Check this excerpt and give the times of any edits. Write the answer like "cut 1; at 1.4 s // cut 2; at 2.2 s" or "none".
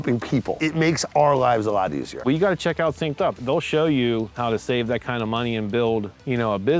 cut 1; at 2.2 s // cut 2; at 3.4 s